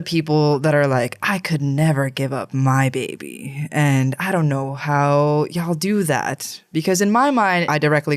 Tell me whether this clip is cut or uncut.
uncut